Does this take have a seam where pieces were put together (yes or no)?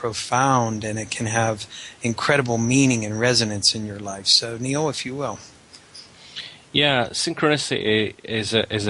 yes